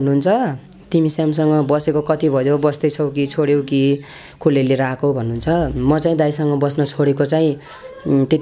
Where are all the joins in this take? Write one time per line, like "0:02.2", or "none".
none